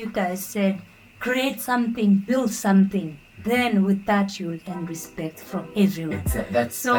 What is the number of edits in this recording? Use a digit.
0